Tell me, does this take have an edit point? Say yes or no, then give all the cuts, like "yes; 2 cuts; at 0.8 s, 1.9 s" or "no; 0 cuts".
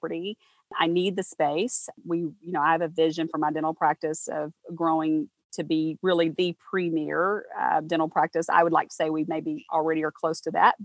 no; 0 cuts